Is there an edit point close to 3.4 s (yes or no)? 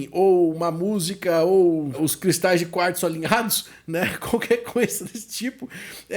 no